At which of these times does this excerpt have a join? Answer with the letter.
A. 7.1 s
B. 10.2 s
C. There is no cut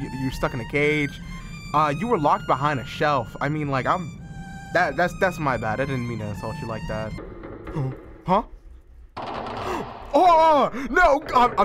A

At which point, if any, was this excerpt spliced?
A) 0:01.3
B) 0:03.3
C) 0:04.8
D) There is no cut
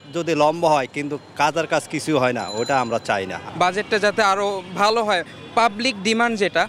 D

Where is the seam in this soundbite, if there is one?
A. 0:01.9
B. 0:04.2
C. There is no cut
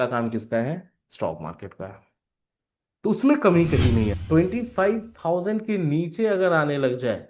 B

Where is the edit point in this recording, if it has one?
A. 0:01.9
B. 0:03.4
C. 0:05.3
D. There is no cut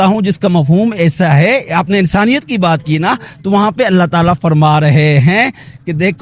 D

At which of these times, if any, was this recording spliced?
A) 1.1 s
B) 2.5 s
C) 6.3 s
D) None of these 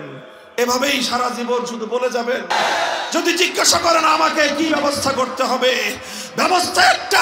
B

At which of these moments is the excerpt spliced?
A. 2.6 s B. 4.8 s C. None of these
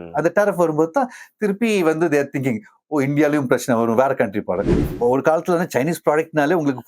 B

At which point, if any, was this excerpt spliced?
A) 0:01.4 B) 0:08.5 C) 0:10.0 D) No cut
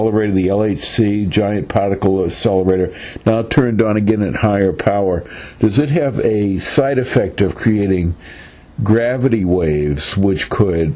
C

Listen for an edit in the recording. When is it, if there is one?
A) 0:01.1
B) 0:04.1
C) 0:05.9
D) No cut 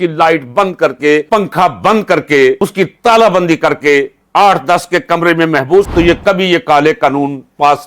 C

